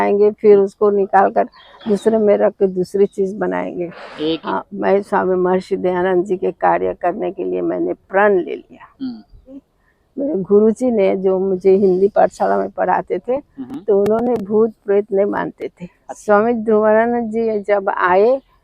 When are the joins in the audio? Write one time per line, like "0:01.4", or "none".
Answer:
0:04.4
0:09.7
0:16.1